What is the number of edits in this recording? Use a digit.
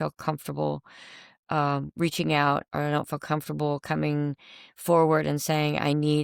0